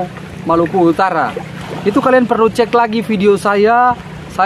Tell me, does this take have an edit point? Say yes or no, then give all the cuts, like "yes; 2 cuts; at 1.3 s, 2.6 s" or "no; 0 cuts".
no; 0 cuts